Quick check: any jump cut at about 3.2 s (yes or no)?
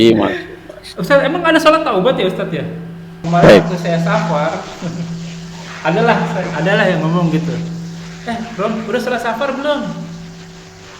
yes